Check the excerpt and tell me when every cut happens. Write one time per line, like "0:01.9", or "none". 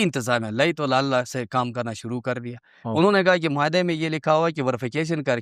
none